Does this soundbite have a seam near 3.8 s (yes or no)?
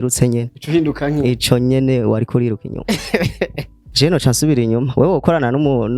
yes